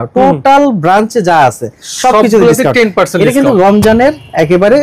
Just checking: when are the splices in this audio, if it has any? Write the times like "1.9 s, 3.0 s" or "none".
none